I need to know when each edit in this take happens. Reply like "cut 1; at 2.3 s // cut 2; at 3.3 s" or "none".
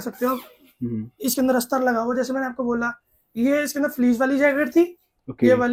none